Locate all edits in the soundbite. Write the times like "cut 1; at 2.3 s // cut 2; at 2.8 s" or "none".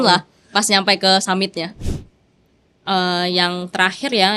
cut 1; at 1.9 s